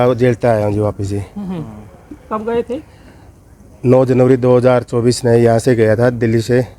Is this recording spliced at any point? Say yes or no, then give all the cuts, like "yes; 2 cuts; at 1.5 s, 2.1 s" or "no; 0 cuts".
no; 0 cuts